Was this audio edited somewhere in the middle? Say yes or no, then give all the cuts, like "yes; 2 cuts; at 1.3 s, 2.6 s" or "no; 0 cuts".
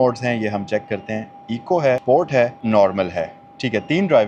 no; 0 cuts